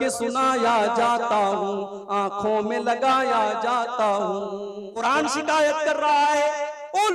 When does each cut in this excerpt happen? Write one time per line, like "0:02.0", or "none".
0:04.8